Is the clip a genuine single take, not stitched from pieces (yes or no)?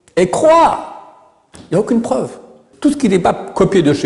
no